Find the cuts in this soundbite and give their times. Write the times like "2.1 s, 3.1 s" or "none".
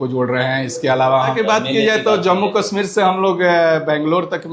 1.3 s